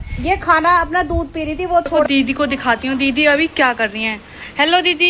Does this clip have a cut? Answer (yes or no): yes